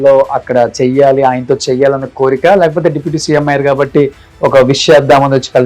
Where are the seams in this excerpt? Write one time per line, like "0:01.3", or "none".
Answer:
none